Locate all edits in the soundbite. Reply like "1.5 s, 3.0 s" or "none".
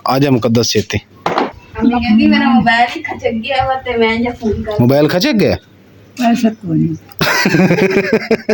1.6 s

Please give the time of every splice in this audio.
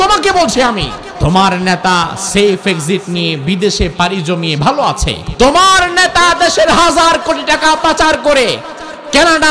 1.0 s, 5.2 s

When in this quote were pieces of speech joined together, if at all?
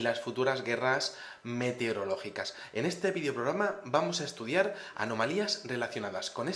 1.9 s

